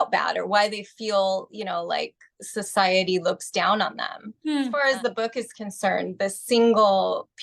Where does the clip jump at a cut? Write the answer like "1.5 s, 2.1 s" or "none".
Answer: 4.7 s